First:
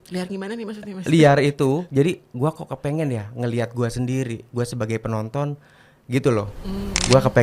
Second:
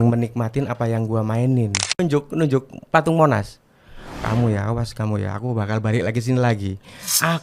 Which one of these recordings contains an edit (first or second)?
second